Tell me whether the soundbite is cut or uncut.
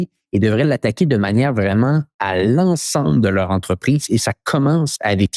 uncut